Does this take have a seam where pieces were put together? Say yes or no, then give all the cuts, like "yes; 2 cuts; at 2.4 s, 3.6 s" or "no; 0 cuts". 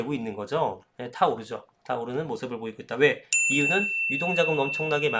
yes; 1 cut; at 1.0 s